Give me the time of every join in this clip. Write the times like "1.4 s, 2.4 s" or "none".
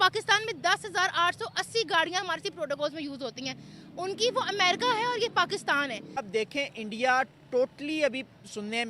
6.2 s